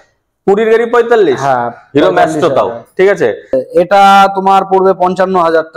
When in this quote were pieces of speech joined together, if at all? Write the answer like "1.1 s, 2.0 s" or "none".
3.5 s